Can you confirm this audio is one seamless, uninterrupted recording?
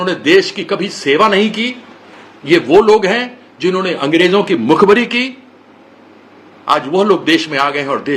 yes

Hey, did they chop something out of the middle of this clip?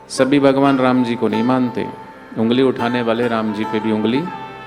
no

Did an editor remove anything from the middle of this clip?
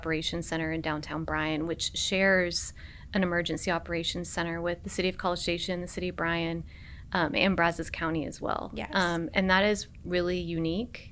no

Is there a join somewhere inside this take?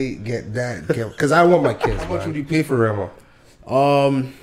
yes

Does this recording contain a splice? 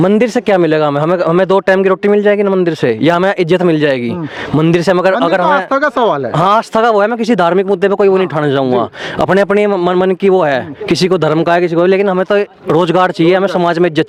no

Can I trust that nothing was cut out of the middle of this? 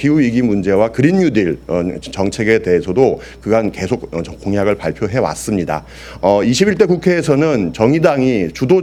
yes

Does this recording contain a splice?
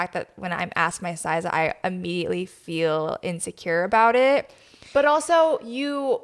no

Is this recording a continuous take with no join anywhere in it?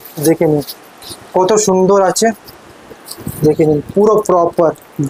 yes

